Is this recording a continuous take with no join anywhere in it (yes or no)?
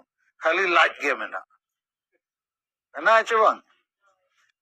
yes